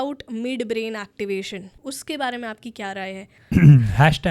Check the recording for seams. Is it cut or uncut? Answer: cut